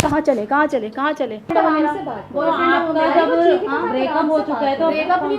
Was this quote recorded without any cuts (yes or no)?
no